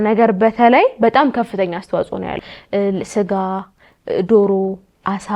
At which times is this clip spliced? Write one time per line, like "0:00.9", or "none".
0:02.3